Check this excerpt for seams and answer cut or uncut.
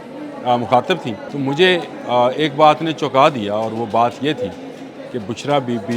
cut